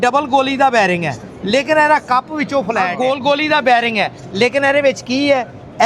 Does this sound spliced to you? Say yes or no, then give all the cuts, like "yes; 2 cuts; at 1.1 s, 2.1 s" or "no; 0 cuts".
yes; 1 cut; at 3.0 s